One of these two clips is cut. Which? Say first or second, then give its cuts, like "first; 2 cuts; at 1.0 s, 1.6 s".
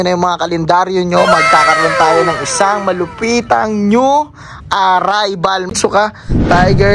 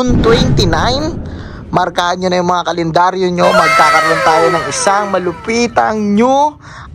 first; 1 cut; at 5.7 s